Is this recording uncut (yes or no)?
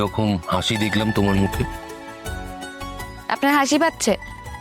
no